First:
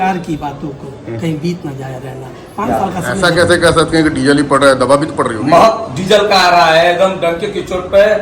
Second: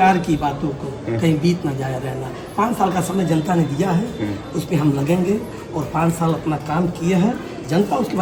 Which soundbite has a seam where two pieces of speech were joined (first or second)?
first